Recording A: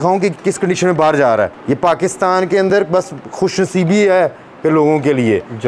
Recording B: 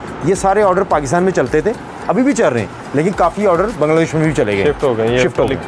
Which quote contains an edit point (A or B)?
A